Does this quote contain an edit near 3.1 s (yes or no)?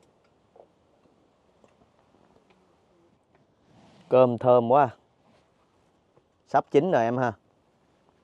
yes